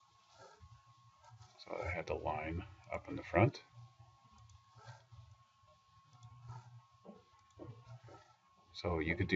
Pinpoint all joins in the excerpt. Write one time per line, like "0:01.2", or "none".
none

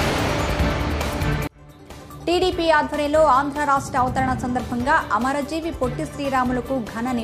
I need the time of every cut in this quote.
0:01.5

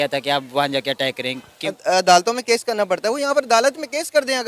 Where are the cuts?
0:01.6

